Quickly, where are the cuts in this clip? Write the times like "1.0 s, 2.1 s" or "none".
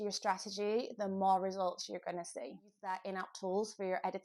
2.9 s